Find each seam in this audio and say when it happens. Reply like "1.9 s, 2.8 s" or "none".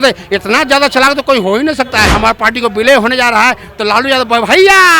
2.1 s